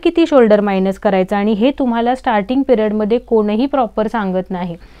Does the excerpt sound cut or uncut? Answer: uncut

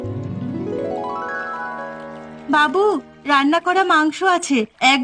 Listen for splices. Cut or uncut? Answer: cut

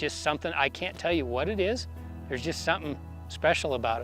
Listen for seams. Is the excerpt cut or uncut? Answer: uncut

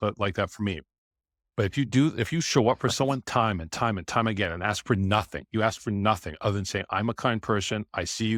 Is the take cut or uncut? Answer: uncut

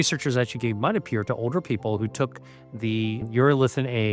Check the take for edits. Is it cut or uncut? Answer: cut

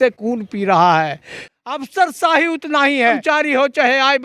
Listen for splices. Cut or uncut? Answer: cut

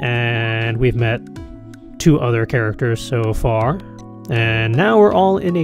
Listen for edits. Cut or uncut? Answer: cut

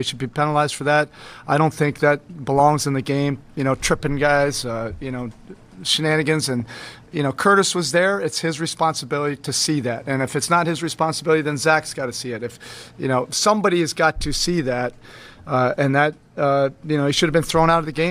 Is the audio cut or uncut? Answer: cut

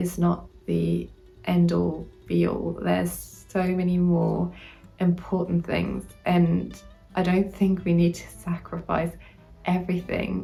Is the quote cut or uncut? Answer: uncut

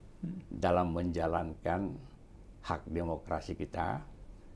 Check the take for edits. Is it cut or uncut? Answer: uncut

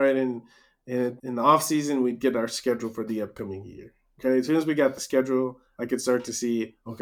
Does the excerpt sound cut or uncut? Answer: cut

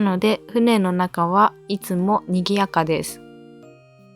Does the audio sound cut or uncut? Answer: cut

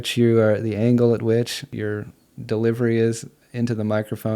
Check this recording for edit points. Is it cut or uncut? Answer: cut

